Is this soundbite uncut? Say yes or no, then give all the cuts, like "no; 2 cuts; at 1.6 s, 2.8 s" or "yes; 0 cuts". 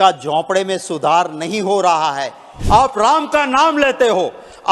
no; 1 cut; at 2.5 s